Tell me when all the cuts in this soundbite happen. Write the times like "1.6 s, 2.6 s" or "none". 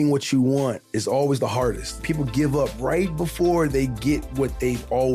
2.0 s